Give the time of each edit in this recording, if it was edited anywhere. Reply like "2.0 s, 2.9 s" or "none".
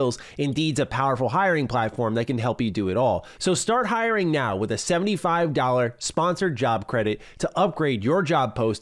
3.3 s